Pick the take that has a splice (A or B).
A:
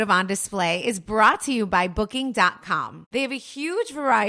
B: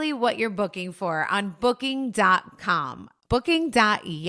A